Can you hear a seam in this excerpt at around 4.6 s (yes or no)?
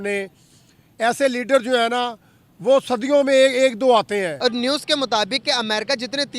yes